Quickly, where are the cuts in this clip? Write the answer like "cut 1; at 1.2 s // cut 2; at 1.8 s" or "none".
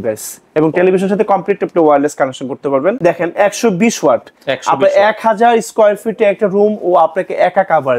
cut 1; at 3.0 s